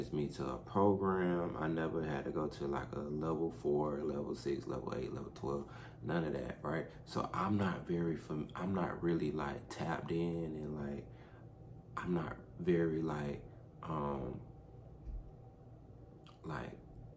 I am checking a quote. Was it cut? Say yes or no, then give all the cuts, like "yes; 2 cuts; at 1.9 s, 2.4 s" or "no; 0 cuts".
no; 0 cuts